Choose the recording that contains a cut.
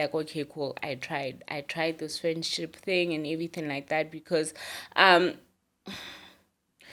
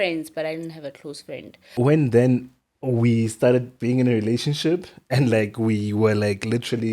second; 1 cut; at 1.7 s

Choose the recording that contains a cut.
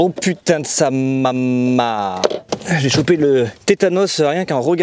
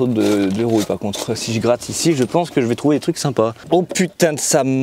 first; 1 cut; at 2.5 s

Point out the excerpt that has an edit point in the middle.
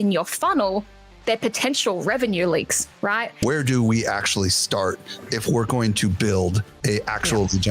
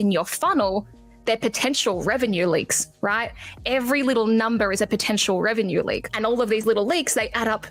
first; 2 cuts; at 3.3 s, 6.7 s

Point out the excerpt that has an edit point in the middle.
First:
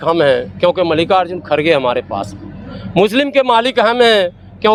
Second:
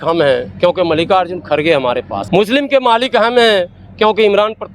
second; 1 cut; at 2.2 s

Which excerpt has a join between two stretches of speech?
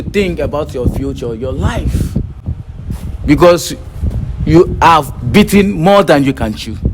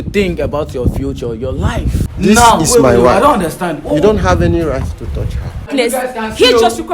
second; 2 cuts; at 2.1 s, 5.7 s

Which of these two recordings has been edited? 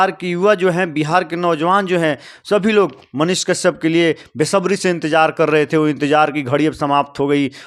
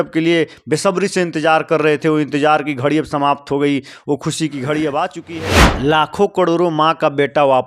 second; 1 cut; at 5.8 s

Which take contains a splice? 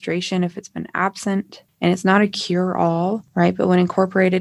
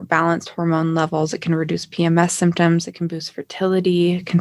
first; 2 cuts; at 1.6 s, 3.2 s

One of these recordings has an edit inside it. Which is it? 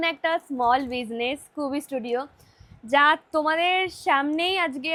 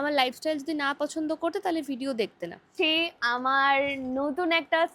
second; 1 cut; at 2.7 s

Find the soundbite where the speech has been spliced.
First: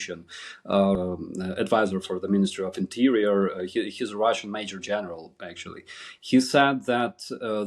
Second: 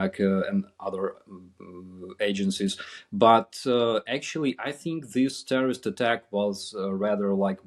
first; 1 cut; at 1.0 s

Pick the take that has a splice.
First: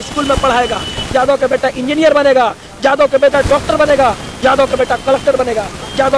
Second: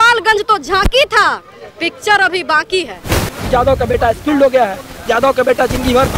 second; 1 cut; at 3.3 s

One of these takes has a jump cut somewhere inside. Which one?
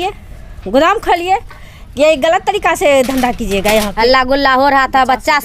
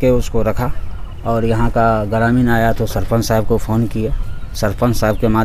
first; 1 cut; at 3.9 s

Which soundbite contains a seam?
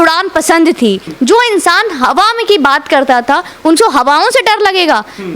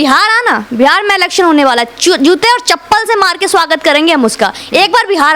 first; 1 cut; at 1.1 s

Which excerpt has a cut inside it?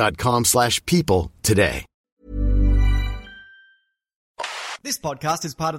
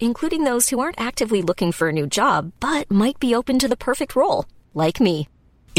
first; 2 cuts; at 1.9 s, 4.3 s

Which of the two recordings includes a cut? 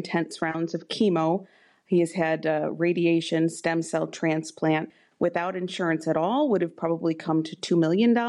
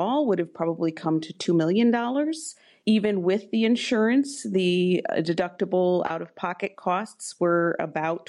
first; 1 cut; at 4.9 s

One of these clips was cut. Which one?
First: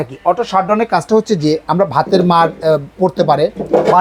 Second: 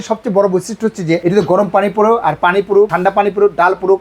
second; 2 cuts; at 1.2 s, 2.9 s

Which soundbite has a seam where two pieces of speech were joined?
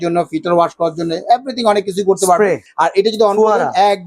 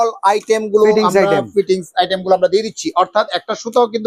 first; 1 cut; at 2.7 s

